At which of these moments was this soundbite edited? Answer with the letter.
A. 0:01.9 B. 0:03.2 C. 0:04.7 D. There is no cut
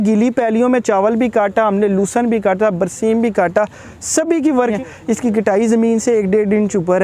C